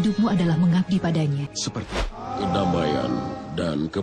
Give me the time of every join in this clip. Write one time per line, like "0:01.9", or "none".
0:02.2